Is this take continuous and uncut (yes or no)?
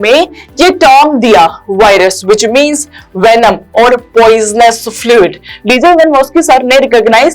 no